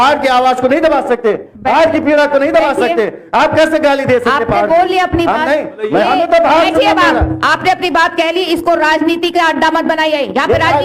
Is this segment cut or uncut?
uncut